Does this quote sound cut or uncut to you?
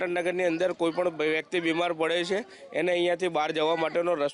uncut